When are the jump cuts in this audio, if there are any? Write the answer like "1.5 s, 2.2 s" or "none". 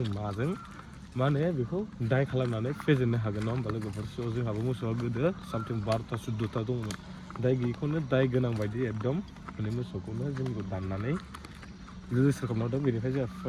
none

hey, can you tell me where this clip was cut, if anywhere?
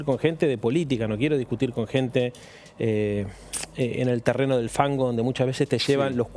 none

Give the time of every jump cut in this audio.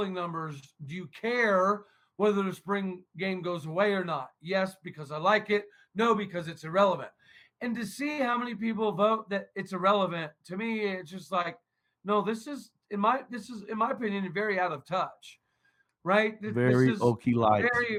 none

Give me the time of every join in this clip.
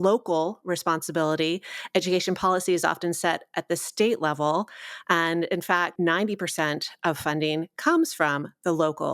5.9 s

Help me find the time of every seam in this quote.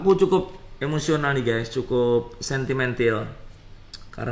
none

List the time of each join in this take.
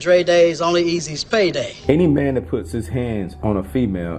1.7 s

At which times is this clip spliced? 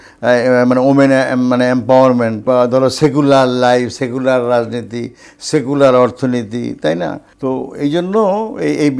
2.4 s, 7.3 s

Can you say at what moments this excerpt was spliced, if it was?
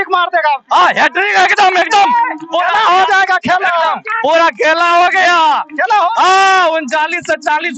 none

